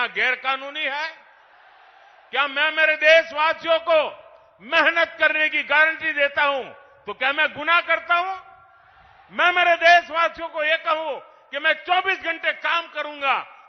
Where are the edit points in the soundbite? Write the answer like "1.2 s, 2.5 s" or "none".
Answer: none